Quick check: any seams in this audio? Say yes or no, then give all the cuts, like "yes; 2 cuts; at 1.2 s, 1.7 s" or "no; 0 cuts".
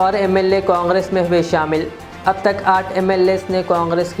no; 0 cuts